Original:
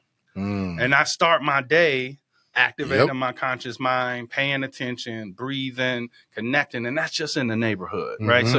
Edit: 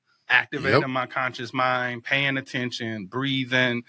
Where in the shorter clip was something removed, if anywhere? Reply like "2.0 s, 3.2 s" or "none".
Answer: none